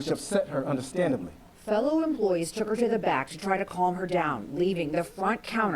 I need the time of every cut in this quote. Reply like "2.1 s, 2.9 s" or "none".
1.5 s, 4.3 s